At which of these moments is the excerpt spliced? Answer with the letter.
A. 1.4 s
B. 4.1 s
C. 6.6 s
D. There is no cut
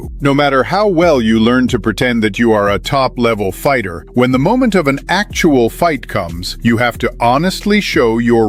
D